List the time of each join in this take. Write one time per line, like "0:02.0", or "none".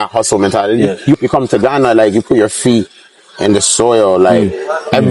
0:01.2